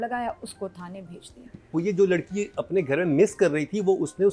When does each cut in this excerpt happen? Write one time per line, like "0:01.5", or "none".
0:01.7